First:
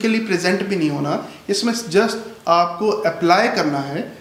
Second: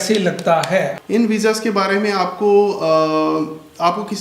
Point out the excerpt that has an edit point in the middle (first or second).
second